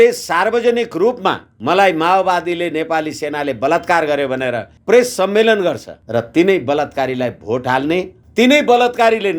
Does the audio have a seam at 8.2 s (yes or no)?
yes